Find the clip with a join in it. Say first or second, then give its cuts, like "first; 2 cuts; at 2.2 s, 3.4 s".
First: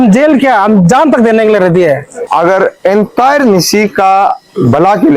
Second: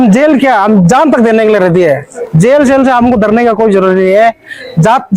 first; 1 cut; at 2.1 s